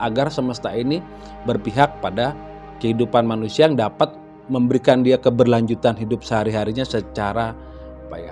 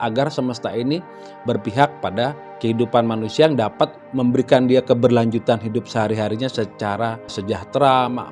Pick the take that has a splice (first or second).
second